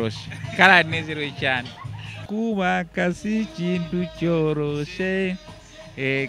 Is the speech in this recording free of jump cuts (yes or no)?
no